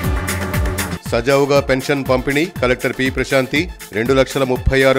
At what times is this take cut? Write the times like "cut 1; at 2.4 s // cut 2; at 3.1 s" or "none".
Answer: none